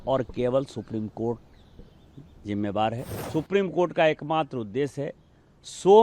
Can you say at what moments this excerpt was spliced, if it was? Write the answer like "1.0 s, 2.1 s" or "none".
3.1 s